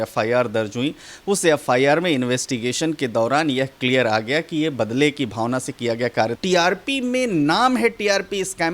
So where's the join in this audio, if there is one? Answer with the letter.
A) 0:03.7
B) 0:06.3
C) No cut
B